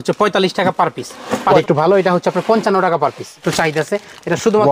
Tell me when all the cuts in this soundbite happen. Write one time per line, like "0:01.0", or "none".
0:01.6
0:03.5